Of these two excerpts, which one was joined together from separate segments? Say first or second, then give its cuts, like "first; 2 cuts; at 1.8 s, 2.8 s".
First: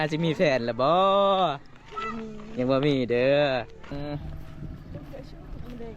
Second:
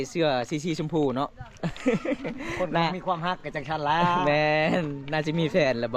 first; 1 cut; at 3.9 s